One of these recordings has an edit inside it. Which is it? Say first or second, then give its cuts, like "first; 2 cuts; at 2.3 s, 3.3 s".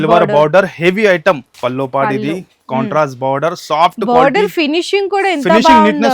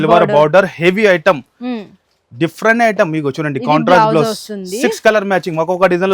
first; 1 cut; at 1.5 s